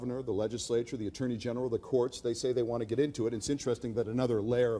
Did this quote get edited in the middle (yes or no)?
yes